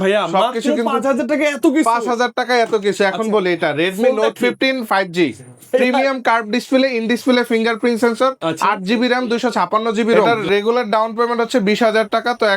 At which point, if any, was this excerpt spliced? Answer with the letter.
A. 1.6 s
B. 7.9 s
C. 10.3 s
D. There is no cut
C